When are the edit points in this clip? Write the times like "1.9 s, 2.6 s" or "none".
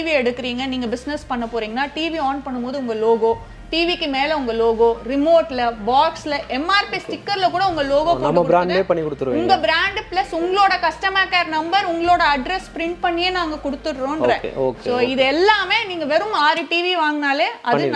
none